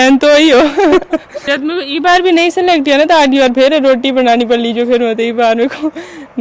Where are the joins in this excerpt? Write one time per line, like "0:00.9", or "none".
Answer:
none